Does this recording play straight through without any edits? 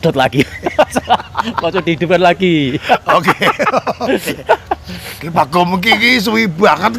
yes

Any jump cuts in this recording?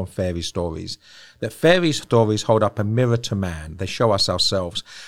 no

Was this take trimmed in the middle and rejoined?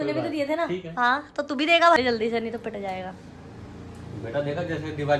yes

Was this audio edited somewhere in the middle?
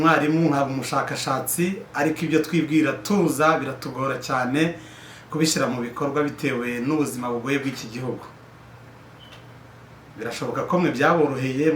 no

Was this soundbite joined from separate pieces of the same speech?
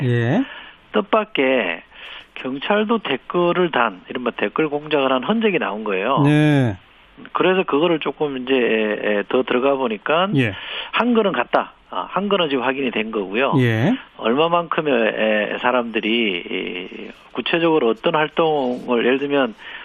yes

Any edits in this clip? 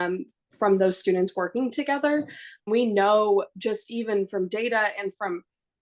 yes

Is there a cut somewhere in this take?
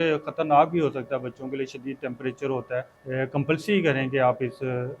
yes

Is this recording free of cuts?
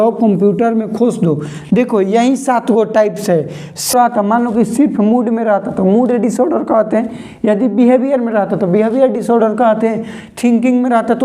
no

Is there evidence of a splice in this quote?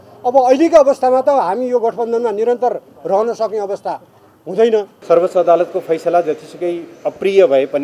yes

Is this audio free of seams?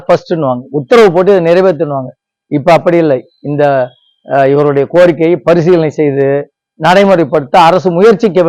yes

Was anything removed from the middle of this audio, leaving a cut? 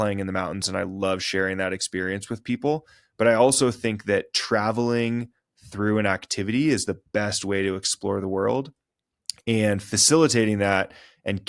no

